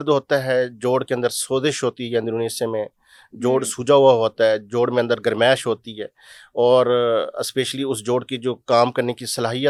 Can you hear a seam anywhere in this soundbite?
no; 0 cuts

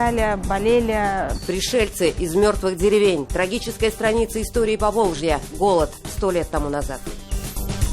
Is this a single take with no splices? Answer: yes; 0 cuts

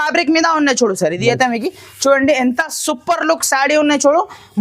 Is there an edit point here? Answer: no; 0 cuts

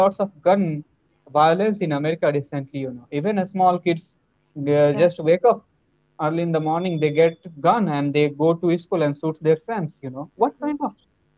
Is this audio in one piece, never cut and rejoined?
yes; 0 cuts

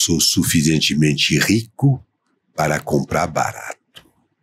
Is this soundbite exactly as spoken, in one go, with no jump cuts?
yes; 0 cuts

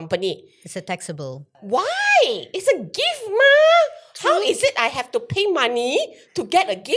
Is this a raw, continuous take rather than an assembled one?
no; 1 cut; at 1.6 s

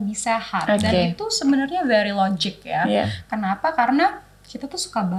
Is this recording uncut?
yes; 0 cuts

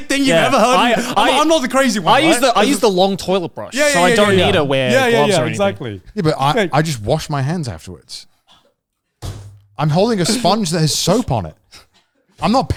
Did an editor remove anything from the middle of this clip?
no; 0 cuts

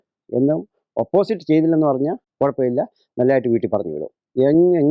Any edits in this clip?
yes; 1 cut; at 2.2 s

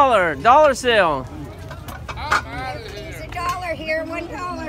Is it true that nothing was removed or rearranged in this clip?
yes; 0 cuts

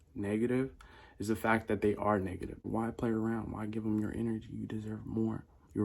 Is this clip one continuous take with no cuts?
no; 1 cut; at 2.5 s

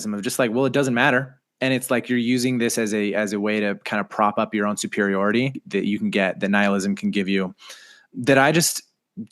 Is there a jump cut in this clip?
yes; 1 cut; at 5.6 s

